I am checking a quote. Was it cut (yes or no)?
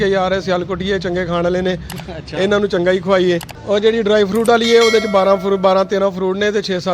yes